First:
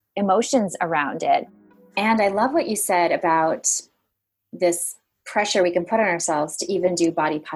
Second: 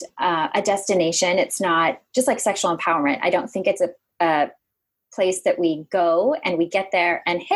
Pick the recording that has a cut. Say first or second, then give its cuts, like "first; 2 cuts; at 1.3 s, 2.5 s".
first; 1 cut; at 1.6 s